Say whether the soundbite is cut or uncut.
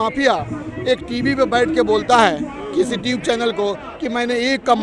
uncut